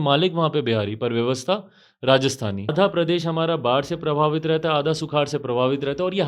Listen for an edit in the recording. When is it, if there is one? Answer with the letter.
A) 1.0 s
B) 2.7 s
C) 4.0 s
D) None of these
B